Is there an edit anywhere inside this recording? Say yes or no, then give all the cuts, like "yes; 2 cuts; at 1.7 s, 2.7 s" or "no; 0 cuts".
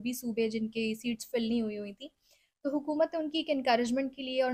no; 0 cuts